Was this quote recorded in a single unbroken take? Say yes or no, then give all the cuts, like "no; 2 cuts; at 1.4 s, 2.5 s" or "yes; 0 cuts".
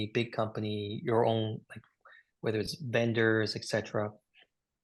yes; 0 cuts